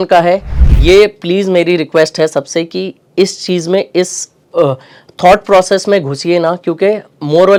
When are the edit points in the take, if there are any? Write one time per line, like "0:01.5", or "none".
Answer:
none